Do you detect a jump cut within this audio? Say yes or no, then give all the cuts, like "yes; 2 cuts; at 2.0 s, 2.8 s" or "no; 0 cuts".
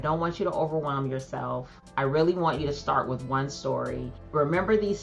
yes; 2 cuts; at 1.8 s, 4.1 s